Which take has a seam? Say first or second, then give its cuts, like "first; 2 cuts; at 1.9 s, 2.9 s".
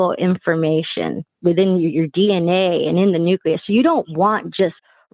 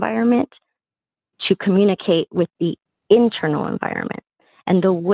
first; 1 cut; at 1.2 s